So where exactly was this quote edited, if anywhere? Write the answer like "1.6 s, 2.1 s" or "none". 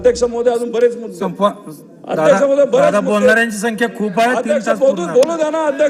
none

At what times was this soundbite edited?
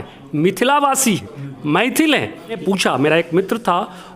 2.6 s

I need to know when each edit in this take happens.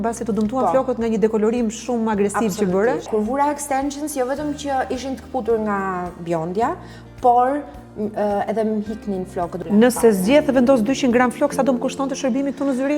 3.1 s, 9.6 s

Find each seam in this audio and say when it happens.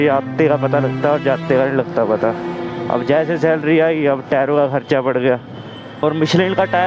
5.9 s

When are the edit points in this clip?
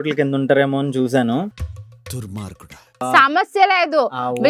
3.1 s

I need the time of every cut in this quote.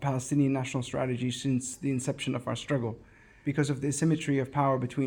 3.4 s

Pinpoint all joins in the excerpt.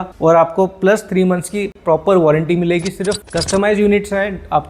3.2 s

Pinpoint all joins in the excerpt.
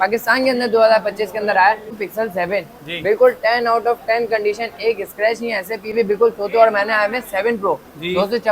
2.0 s, 5.9 s

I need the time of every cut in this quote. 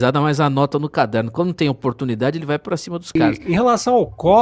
3.2 s

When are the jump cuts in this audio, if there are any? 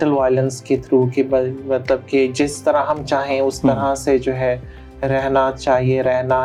none

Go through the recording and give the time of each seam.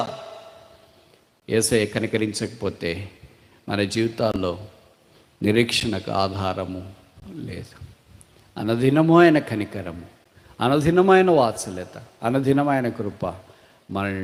none

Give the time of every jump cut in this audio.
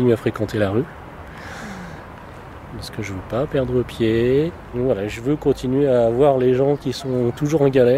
4.6 s

